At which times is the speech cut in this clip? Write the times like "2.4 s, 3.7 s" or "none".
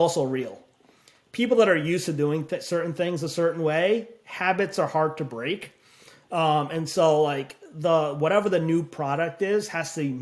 none